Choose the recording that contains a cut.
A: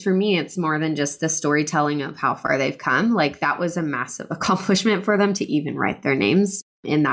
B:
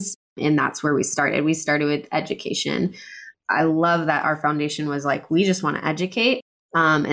B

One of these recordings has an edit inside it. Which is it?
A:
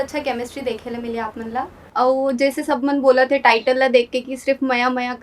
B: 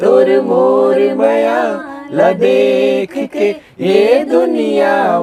A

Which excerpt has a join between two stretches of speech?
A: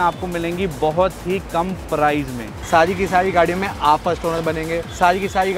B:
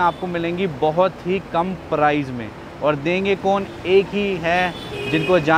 A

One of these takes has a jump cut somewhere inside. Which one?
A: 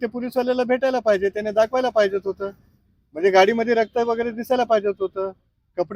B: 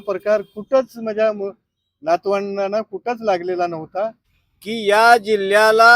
B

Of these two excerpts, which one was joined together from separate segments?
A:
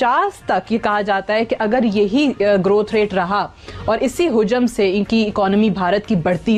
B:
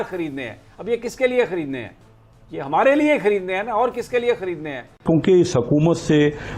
B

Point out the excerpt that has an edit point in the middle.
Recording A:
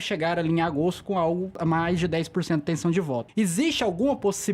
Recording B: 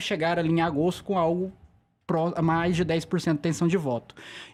A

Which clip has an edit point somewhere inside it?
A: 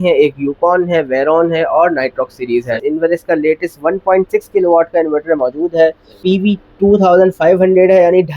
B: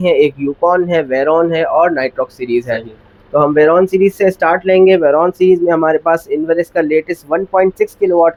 A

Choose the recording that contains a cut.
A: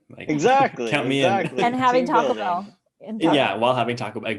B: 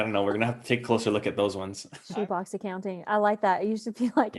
B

